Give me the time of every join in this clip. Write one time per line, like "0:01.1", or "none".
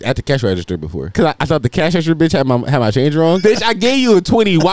0:01.1
0:03.4